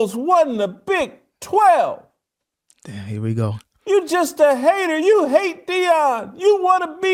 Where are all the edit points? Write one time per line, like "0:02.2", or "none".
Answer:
none